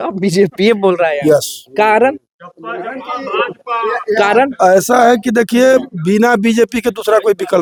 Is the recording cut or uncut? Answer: uncut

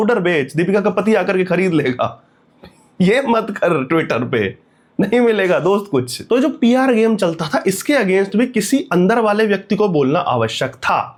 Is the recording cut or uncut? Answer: uncut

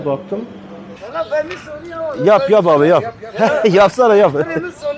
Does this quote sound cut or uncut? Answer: cut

